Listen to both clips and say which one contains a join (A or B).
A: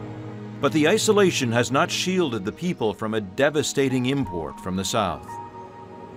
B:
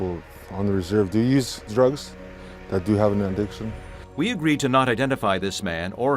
B